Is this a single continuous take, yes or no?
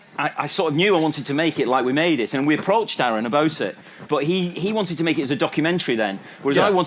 no